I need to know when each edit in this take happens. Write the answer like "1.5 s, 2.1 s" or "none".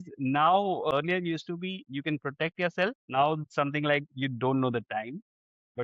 0.9 s, 3.0 s

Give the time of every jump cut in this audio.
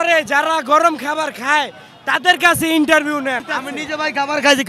3.5 s

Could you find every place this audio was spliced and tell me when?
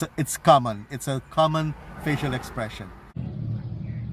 3.2 s

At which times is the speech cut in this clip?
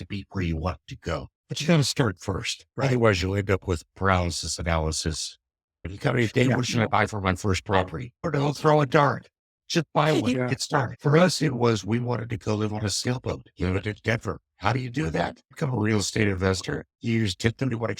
10.9 s

